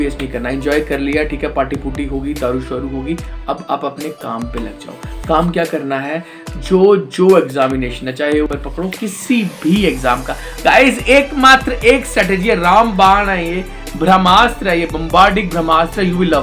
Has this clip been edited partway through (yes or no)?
yes